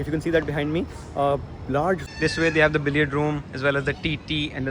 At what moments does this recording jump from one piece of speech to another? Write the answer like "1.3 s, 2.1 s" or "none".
2.1 s